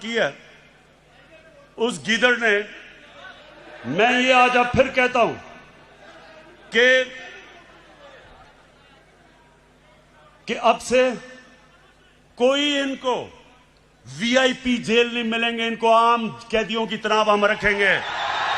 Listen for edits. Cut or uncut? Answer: uncut